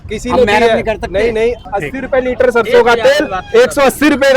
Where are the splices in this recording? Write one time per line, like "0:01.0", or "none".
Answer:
0:01.6